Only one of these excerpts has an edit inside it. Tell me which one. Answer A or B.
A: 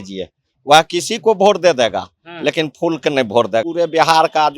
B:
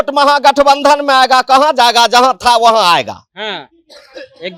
A